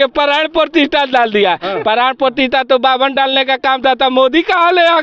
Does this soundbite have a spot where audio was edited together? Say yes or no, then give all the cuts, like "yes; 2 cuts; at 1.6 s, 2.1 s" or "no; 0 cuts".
no; 0 cuts